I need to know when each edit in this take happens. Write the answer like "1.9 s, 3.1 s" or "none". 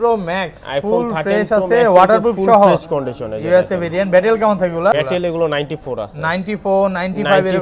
4.9 s